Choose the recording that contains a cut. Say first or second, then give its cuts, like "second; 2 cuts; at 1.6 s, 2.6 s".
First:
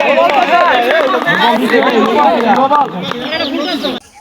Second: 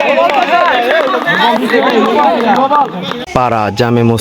second; 1 cut; at 3.1 s